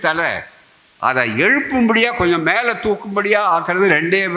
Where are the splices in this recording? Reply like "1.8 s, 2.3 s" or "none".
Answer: none